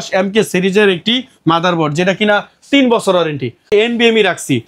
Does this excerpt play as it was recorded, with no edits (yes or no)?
no